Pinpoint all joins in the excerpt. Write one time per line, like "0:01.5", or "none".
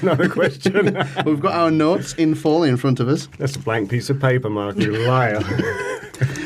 0:04.0